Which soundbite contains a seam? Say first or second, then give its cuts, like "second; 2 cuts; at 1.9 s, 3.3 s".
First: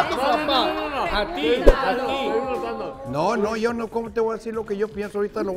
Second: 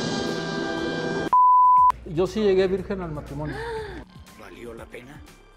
second; 1 cut; at 2.0 s